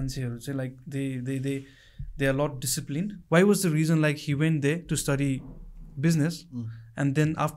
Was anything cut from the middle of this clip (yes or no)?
yes